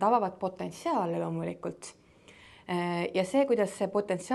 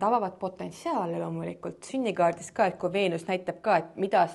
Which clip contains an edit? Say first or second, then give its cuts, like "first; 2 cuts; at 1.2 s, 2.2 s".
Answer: second; 1 cut; at 1.9 s